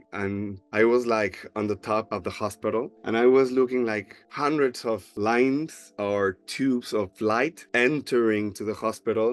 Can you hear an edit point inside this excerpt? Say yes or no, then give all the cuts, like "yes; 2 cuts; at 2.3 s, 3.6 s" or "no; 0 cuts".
no; 0 cuts